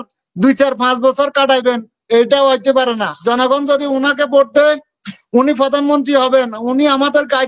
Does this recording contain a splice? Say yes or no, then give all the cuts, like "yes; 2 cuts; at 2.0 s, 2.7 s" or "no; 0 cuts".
yes; 1 cut; at 3.2 s